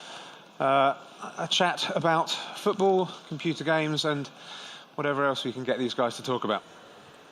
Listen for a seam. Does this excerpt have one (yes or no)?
no